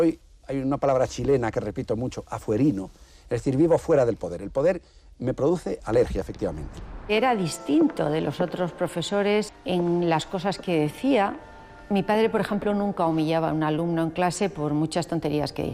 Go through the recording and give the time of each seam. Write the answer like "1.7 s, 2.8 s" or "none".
7.1 s, 9.5 s